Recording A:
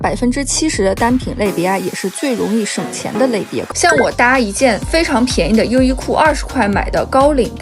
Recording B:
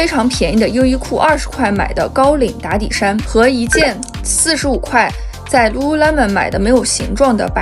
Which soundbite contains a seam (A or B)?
A